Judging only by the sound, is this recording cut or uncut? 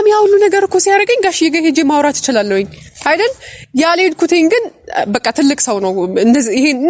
uncut